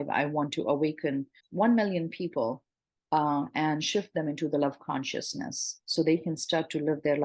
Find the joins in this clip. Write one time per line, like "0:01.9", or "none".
none

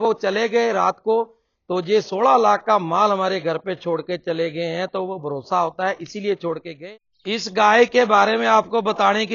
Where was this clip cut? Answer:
0:06.7

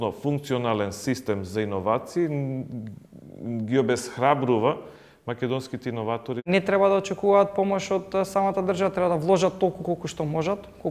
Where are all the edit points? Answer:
0:06.5

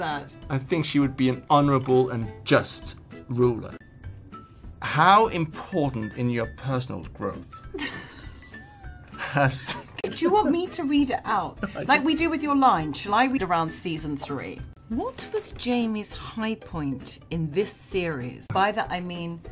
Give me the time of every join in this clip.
none

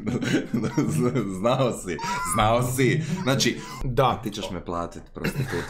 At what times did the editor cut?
0:03.8

